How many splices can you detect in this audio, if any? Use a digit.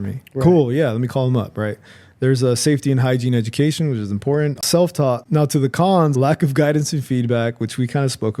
2